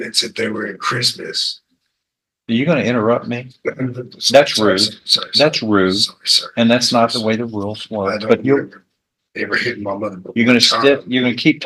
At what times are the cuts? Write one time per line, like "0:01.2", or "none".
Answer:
none